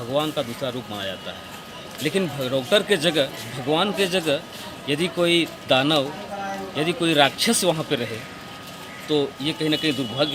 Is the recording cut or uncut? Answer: uncut